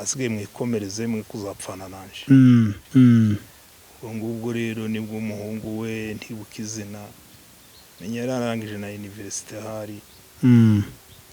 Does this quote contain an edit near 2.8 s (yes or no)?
yes